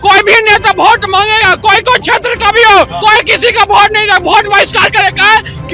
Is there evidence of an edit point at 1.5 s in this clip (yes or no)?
no